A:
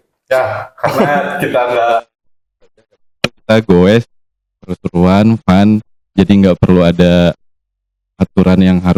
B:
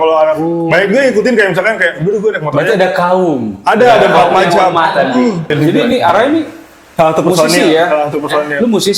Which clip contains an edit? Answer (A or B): B